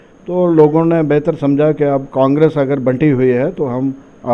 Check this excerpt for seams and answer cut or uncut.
uncut